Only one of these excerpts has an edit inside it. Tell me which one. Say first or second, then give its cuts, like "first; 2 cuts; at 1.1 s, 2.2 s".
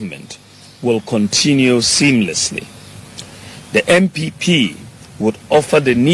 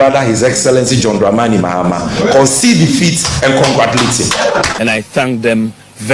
second; 1 cut; at 4.7 s